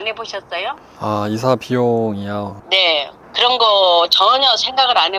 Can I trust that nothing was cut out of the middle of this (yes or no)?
no